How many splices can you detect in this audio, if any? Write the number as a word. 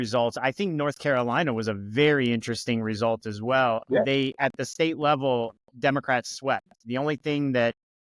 zero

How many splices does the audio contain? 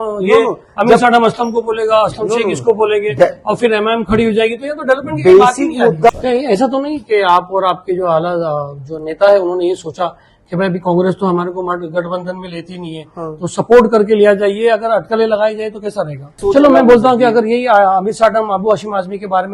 two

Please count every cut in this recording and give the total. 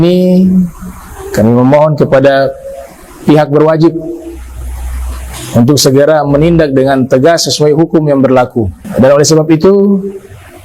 one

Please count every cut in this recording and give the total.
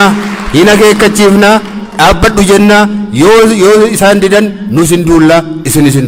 zero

